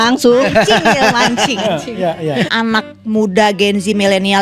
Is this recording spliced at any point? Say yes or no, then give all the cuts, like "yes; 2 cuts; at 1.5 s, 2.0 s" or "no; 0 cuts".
yes; 1 cut; at 2.5 s